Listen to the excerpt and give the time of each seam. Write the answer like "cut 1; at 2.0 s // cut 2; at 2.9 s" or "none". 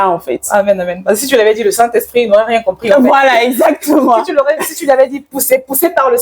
none